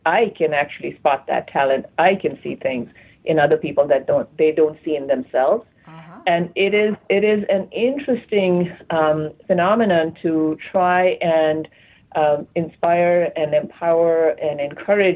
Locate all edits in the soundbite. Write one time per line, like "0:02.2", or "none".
none